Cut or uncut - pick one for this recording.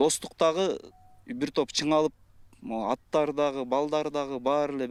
uncut